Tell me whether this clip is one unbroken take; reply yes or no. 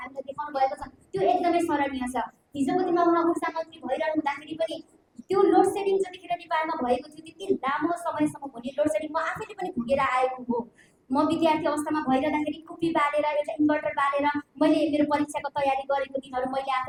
yes